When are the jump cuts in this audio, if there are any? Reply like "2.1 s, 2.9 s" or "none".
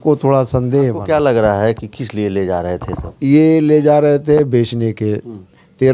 1.0 s